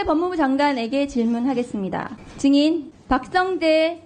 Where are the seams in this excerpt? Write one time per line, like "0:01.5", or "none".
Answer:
0:02.2
0:02.9